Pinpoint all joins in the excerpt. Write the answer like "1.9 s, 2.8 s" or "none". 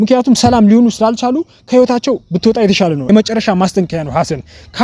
3.1 s